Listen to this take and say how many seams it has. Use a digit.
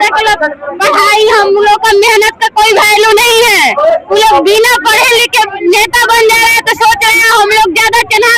0